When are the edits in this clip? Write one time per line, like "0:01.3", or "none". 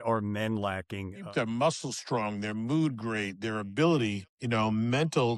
0:01.3